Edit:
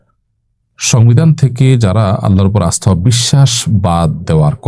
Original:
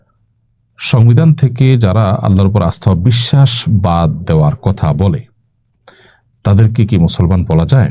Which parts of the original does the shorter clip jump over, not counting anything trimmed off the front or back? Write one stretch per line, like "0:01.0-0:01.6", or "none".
none